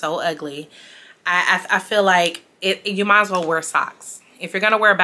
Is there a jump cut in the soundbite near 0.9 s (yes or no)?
no